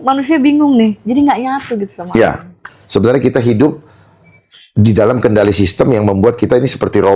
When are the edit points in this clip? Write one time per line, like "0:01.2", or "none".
0:02.6